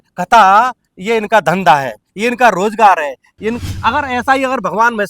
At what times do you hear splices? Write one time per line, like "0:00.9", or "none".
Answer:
0:03.6